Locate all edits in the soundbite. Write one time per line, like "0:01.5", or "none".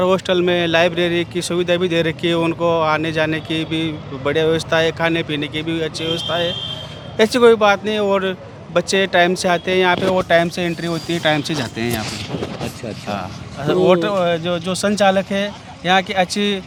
none

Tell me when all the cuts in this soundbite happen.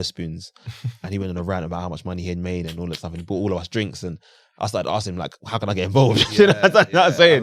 none

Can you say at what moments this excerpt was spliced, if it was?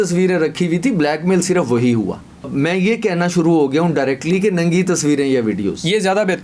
0:02.5

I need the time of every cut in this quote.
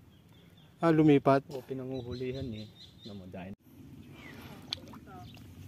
0:03.5

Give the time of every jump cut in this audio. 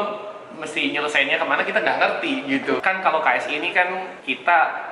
0:02.8

